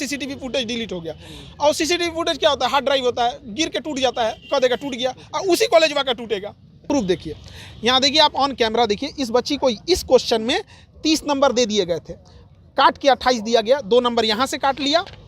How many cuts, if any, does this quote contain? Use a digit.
1